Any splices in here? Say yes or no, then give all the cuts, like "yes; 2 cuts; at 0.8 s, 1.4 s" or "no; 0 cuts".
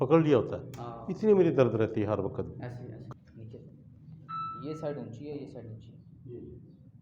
yes; 1 cut; at 2.9 s